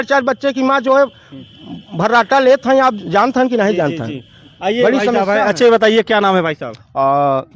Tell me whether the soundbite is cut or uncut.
uncut